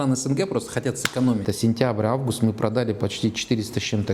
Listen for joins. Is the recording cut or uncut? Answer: cut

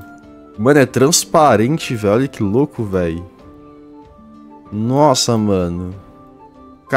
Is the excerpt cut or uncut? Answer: uncut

